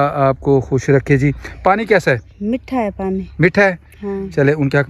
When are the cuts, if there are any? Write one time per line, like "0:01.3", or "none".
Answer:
none